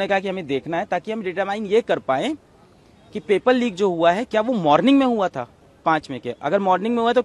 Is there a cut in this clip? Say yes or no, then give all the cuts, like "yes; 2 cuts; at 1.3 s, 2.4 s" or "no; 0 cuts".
no; 0 cuts